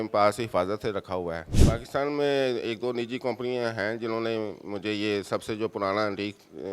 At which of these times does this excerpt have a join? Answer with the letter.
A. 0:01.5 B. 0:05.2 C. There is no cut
A